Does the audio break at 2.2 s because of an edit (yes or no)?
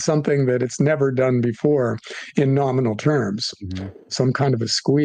no